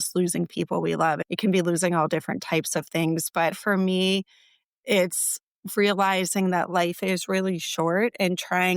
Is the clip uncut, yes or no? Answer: no